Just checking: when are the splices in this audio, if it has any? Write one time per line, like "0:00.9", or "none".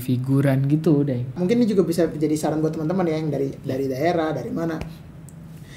0:01.3